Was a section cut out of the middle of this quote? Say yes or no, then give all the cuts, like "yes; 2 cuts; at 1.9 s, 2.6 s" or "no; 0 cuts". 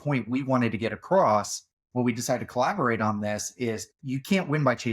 no; 0 cuts